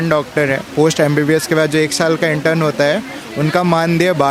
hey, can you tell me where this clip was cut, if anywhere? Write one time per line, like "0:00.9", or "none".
none